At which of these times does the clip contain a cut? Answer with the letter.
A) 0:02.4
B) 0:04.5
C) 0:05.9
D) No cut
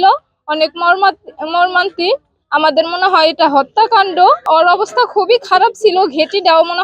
B